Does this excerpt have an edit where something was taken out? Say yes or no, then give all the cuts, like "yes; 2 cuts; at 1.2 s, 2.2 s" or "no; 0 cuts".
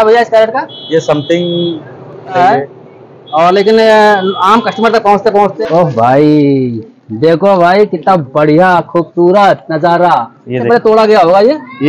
yes; 3 cuts; at 2.4 s, 5.5 s, 10.6 s